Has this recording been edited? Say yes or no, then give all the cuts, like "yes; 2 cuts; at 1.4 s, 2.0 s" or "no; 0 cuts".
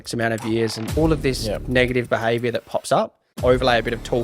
yes; 2 cuts; at 1.0 s, 3.4 s